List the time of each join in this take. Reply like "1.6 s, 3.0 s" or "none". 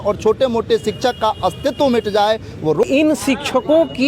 2.8 s

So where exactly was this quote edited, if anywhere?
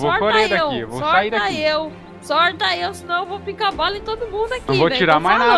none

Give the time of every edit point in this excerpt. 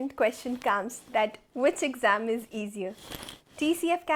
none

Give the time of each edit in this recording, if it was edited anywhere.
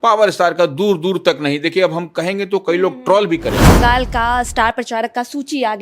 3.7 s

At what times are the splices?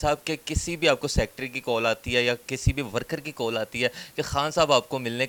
none

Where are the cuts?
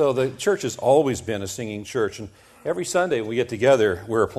none

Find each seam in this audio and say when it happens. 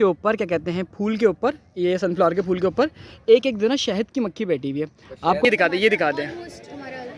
5.4 s

